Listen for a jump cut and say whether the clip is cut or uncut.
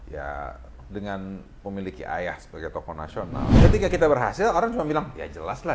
cut